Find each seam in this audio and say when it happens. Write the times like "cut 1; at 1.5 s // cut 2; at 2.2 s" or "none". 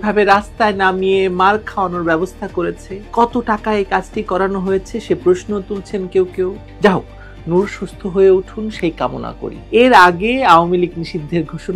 cut 1; at 6.6 s // cut 2; at 9.6 s